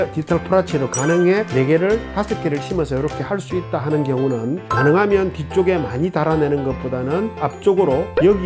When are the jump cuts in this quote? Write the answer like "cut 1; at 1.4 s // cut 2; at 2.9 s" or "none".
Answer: none